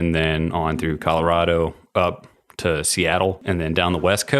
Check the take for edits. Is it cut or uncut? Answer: cut